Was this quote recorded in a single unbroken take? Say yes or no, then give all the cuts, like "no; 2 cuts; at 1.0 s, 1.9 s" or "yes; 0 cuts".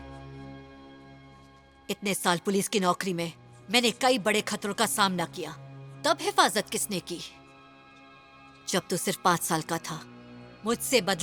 yes; 0 cuts